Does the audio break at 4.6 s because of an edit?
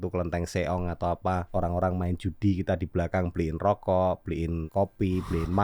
yes; 2 cuts; at 1.5 s, 4.6 s

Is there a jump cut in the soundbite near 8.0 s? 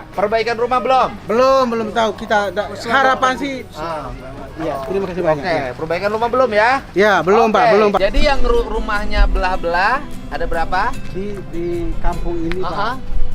yes; 1 cut; at 8.0 s

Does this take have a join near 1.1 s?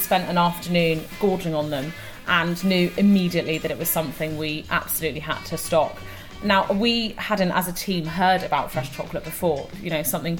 yes; 1 cut; at 1.1 s

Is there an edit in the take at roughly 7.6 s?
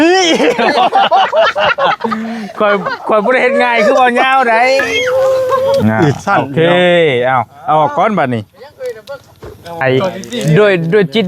no; 2 cuts; at 5.8 s, 9.8 s

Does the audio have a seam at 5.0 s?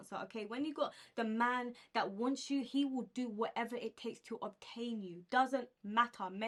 no; 0 cuts

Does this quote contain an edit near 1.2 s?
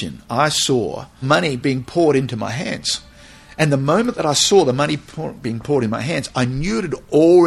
yes; 1 cut; at 1.2 s

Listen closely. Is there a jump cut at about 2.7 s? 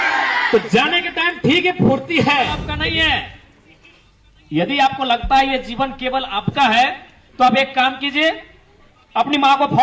yes; 1 cut; at 2.7 s

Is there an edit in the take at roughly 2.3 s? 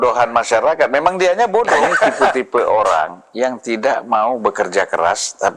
yes; 1 cut; at 2.3 s

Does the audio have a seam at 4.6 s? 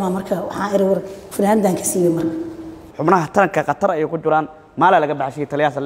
no; 1 cut; at 2.8 s

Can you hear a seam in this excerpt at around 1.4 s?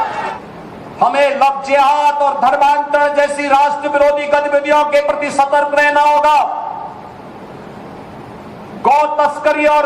yes; 1 cut; at 1.4 s

